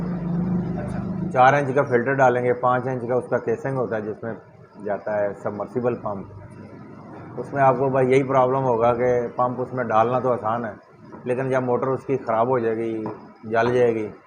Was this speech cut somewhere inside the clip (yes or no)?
yes